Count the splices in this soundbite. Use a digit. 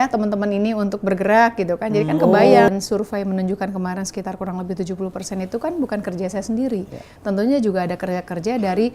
1